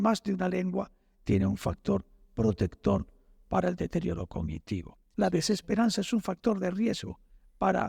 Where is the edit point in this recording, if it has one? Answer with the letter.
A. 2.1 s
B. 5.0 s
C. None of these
B